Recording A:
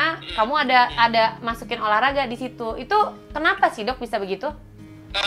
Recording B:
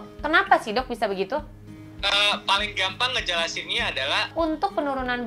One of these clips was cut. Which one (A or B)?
B